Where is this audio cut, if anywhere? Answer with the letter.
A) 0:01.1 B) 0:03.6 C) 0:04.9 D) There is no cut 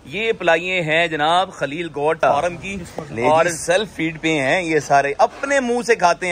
B